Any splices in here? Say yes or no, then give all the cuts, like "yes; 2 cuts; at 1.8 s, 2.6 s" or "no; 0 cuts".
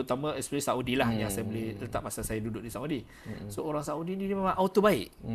no; 0 cuts